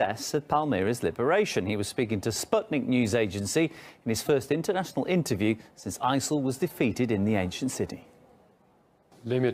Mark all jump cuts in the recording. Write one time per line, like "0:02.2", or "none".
0:04.0